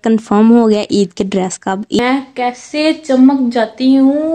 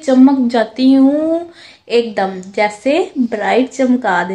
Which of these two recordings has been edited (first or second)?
first